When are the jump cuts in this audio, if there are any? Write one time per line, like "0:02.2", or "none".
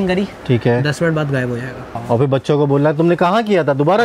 0:01.9